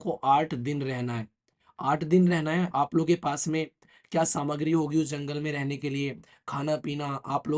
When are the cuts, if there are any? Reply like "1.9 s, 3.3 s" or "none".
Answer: none

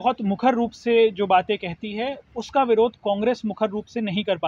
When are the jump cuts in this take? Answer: none

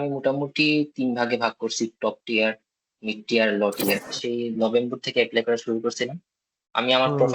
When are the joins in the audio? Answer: 4.1 s

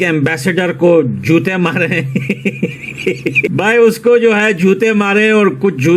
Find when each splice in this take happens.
3.5 s

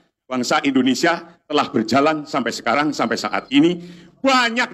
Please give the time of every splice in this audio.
none

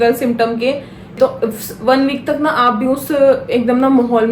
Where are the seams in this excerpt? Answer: 1.2 s

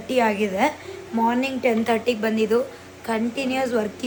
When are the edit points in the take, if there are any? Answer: none

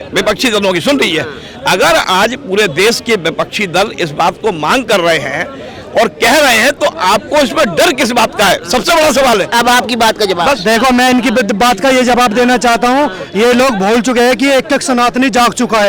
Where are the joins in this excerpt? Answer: none

